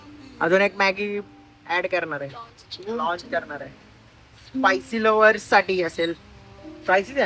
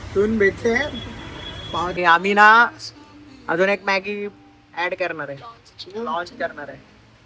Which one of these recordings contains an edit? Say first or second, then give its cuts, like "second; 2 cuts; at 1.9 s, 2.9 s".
second; 1 cut; at 2.0 s